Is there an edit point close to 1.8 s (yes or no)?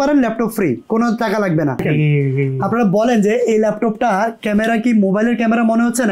yes